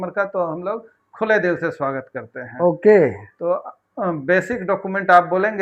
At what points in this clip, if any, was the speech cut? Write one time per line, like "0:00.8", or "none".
none